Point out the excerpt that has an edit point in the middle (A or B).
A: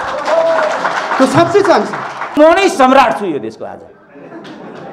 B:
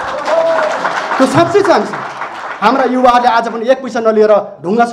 A